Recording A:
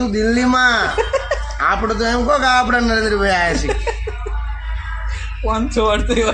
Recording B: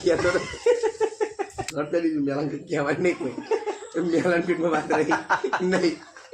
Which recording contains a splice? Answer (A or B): B